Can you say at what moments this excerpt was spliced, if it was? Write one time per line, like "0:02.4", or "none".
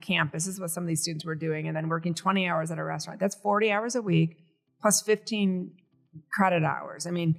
none